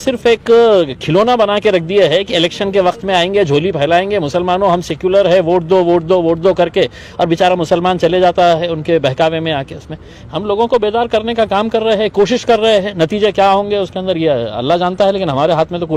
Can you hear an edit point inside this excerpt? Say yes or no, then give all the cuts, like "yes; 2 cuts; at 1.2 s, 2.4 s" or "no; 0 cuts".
no; 0 cuts